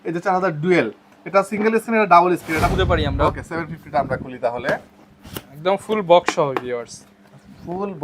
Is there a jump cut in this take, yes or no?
yes